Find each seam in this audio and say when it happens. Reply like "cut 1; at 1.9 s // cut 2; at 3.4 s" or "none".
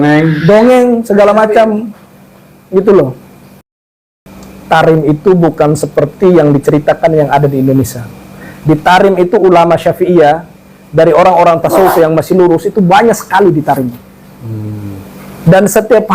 cut 1; at 3.9 s

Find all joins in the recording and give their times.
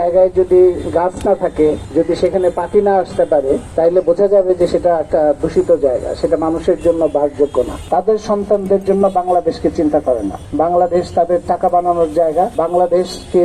cut 1; at 1.8 s // cut 2; at 3.7 s // cut 3; at 7.8 s // cut 4; at 10.4 s // cut 5; at 12.5 s

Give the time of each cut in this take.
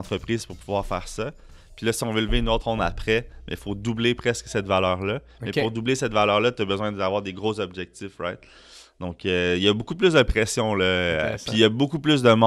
cut 1; at 2.6 s

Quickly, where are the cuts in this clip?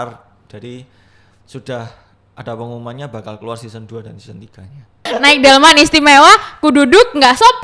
cut 1; at 5.1 s

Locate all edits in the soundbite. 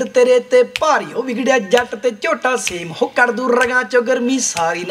none

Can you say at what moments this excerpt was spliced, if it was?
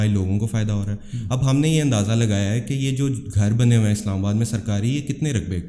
none

